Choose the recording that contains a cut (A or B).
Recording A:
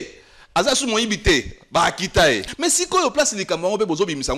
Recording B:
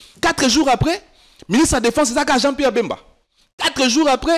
A